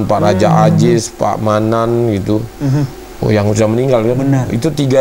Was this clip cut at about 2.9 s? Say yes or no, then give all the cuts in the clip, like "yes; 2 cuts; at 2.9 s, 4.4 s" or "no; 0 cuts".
no; 0 cuts